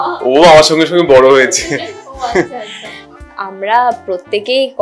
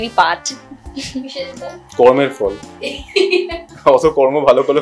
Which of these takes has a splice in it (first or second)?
first